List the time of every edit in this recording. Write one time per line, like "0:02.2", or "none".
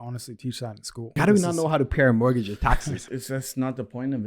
0:01.1
0:03.0